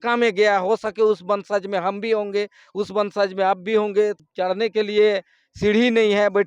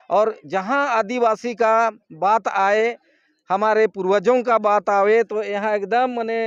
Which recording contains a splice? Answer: first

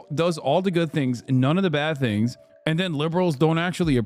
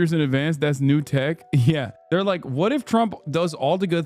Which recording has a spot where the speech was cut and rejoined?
second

